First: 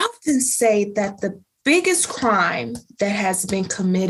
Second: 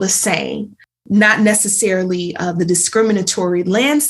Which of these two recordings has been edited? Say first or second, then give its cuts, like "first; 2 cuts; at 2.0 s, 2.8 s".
second; 1 cut; at 1.0 s